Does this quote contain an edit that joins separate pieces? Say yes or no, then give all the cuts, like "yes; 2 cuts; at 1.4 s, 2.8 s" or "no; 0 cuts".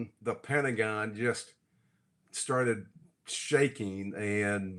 no; 0 cuts